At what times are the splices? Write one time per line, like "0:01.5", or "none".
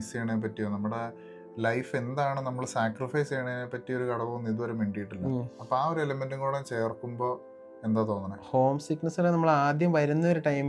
none